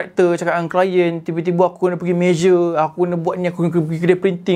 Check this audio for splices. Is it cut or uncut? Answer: uncut